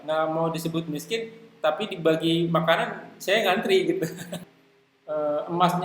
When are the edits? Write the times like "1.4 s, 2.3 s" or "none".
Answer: 4.3 s